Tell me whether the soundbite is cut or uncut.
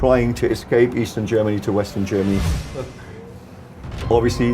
cut